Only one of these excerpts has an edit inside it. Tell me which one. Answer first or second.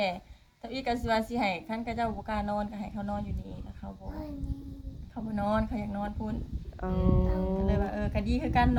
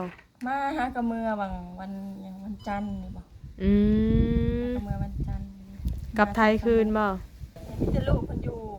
second